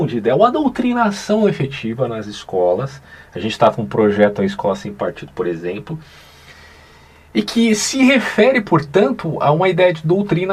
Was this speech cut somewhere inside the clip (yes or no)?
no